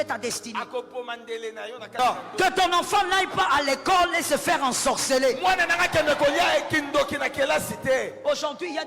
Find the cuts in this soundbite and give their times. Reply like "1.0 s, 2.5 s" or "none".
2.3 s